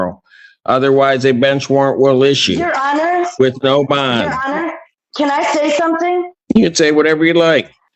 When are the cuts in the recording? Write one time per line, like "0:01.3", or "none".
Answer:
none